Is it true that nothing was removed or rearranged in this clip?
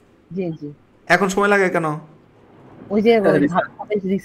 yes; 0 cuts

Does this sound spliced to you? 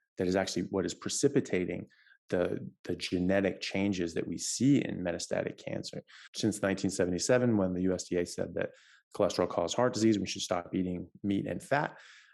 yes; 1 cut; at 6.2 s

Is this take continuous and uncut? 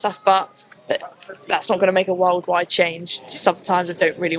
no; 1 cut; at 3.1 s

